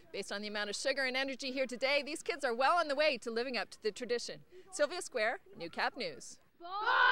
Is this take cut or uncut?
uncut